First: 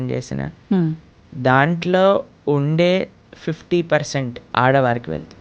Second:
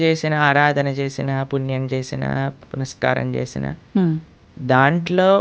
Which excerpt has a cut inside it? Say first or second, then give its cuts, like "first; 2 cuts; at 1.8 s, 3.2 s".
first; 1 cut; at 4.4 s